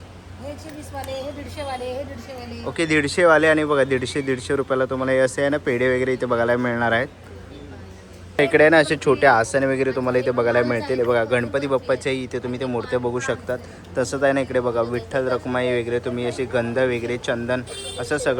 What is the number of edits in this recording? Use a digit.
0